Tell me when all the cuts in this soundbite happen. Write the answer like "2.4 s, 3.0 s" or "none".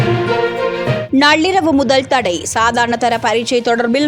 1.1 s